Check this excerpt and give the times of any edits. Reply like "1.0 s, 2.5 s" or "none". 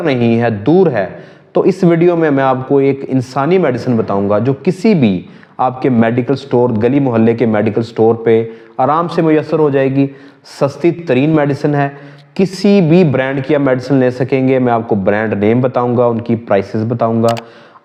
none